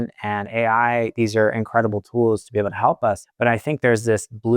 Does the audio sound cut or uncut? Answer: cut